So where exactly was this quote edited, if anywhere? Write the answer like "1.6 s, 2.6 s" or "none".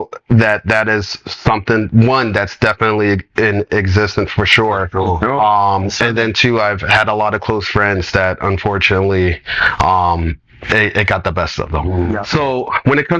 12.2 s